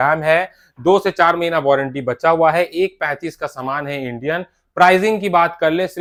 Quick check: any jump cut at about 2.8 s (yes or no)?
no